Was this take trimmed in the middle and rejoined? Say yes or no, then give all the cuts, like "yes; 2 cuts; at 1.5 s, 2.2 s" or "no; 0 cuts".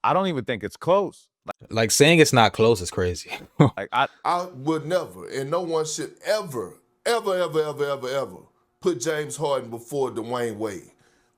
yes; 1 cut; at 4.2 s